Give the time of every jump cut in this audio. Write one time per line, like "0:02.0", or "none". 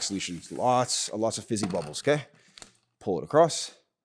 none